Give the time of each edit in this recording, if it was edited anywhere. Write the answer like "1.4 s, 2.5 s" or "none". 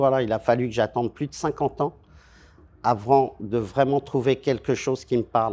none